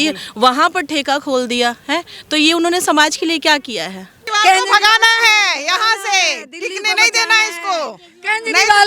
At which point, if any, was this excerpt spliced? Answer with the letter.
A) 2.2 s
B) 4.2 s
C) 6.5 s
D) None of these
B